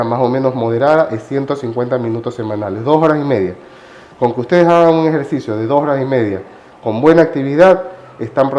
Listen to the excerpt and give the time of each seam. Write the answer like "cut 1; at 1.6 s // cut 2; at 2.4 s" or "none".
none